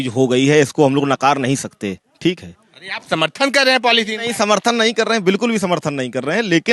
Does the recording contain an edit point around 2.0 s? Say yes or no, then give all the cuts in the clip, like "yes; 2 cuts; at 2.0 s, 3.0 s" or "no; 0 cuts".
no; 0 cuts